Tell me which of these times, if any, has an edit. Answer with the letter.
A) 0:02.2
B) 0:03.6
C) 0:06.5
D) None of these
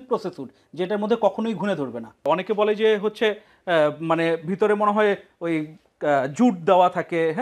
A